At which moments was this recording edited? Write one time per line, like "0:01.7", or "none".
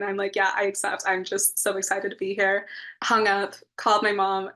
0:02.9